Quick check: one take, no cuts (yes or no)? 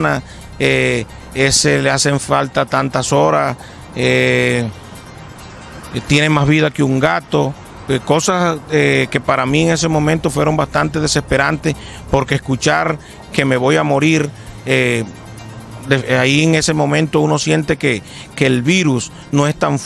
yes